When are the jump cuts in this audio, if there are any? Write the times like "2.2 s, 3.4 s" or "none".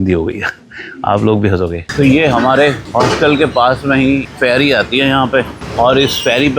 1.8 s, 2.8 s, 4.2 s, 5.6 s